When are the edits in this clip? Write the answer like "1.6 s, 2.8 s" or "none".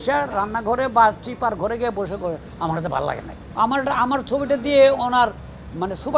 3.4 s